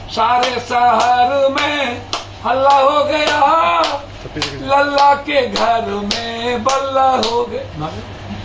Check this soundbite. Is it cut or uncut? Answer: uncut